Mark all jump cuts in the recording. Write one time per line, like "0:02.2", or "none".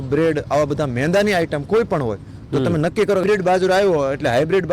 0:03.2